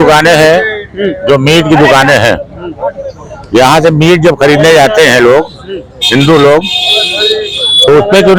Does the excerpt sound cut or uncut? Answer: uncut